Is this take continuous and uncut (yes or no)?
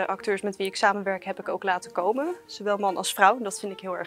yes